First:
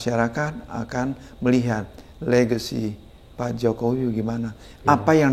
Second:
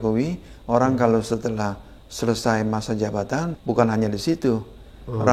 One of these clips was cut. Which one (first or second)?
second